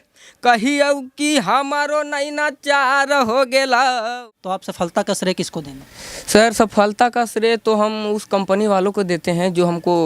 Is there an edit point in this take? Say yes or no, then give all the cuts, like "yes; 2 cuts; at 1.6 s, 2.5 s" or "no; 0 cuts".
yes; 1 cut; at 4.1 s